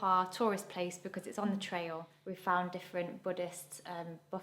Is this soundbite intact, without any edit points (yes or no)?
no